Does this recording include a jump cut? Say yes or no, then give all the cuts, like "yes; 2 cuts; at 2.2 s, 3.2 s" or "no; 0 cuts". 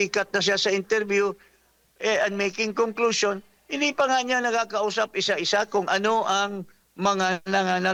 no; 0 cuts